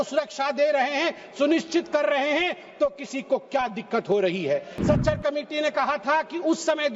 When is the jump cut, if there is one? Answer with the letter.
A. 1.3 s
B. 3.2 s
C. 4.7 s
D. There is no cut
C